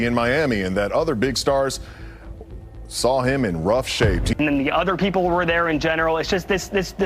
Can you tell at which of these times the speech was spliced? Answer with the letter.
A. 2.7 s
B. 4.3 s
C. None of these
B